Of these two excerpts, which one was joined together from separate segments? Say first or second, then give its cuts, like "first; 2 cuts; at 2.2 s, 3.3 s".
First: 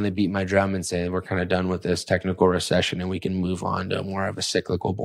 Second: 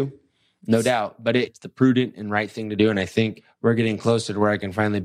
second; 2 cuts; at 1.6 s, 3.5 s